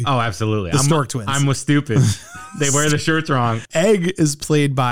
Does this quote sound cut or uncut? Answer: cut